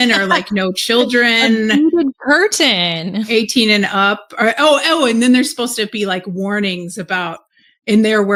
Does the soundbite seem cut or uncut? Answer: uncut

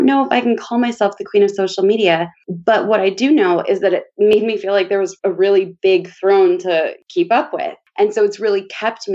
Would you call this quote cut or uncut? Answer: cut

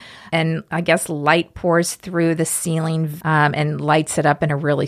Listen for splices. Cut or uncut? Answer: cut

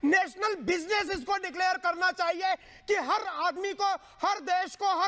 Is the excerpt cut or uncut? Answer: uncut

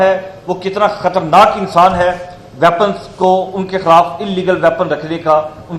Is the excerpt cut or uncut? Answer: uncut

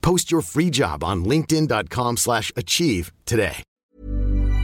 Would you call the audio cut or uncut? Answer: cut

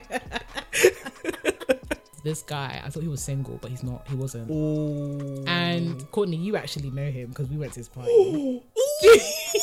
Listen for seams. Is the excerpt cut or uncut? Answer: cut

